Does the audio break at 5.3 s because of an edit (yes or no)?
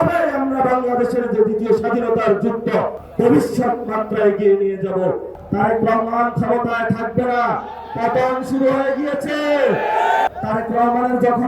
yes